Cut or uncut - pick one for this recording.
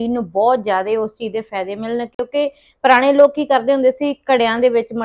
uncut